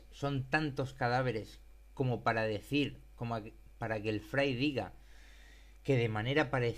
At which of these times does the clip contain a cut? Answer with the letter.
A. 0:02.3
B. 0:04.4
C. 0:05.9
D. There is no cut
A